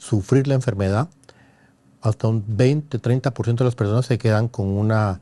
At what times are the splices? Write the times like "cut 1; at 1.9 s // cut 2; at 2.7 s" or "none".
none